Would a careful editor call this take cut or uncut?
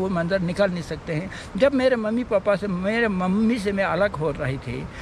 uncut